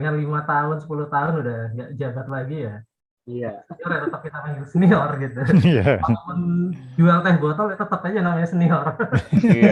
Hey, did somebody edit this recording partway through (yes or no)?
no